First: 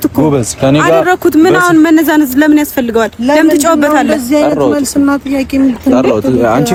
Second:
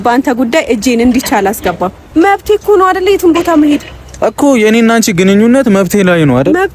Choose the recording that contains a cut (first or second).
second